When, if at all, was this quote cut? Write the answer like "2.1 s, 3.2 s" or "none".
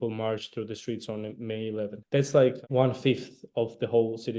2.0 s, 2.6 s